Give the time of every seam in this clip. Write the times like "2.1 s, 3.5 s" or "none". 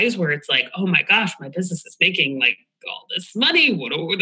none